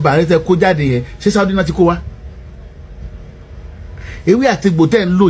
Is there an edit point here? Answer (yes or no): no